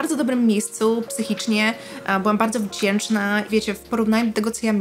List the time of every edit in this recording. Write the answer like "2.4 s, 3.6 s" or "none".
3.5 s